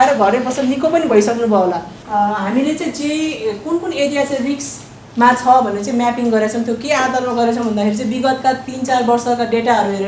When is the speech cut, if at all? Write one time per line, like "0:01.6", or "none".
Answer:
0:01.9